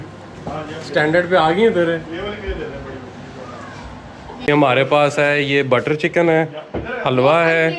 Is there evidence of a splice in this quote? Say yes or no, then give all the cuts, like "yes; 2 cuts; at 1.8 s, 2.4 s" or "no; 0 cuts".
yes; 1 cut; at 4.5 s